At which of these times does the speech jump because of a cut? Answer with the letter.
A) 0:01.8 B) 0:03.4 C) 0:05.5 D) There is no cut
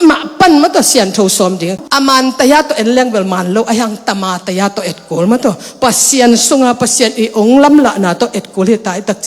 A